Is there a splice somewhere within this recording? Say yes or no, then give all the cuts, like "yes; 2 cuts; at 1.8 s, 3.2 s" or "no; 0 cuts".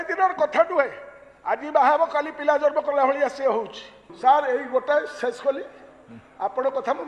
yes; 1 cut; at 4.1 s